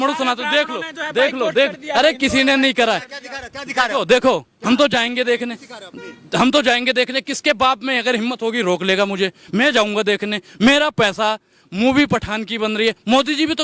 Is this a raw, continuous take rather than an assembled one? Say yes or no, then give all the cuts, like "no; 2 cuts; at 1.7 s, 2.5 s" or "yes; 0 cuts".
yes; 0 cuts